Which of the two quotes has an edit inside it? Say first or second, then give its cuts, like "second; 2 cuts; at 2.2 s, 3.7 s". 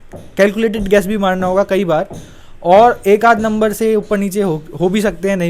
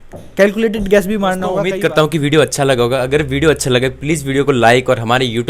second; 1 cut; at 1.6 s